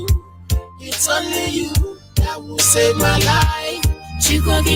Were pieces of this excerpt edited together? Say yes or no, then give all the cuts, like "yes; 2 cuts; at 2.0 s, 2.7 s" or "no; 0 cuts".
no; 0 cuts